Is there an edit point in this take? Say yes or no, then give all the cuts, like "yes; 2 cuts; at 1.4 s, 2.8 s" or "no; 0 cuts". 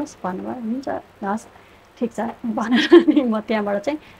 no; 0 cuts